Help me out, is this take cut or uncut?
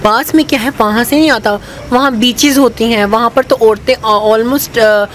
uncut